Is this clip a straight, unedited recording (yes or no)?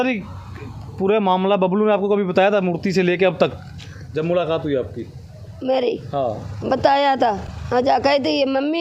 yes